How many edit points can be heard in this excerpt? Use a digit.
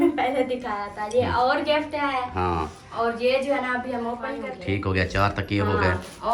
1